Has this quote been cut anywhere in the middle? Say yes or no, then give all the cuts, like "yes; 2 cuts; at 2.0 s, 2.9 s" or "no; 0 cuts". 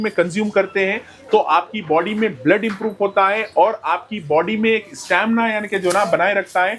no; 0 cuts